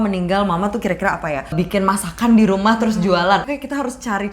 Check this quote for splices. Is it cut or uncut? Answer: cut